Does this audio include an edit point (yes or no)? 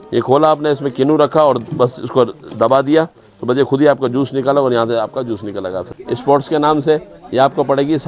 yes